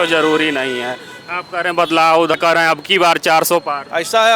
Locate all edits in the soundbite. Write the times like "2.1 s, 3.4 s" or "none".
0.9 s, 2.3 s